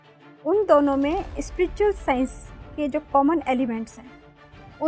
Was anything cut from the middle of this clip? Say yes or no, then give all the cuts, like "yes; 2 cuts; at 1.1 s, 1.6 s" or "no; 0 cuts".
no; 0 cuts